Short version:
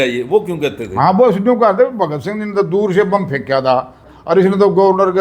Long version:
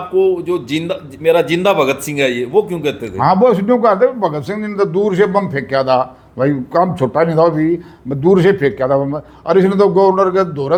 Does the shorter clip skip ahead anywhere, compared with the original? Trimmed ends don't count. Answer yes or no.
yes